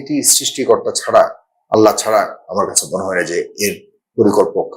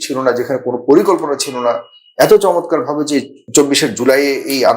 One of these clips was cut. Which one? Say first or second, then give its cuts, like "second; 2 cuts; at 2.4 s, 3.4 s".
second; 1 cut; at 3.4 s